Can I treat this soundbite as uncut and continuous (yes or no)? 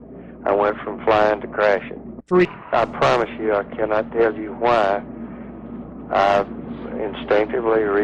no